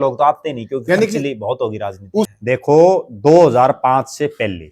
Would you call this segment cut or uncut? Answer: cut